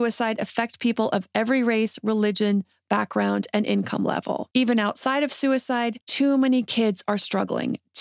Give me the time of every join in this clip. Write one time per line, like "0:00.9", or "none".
0:04.4
0:06.0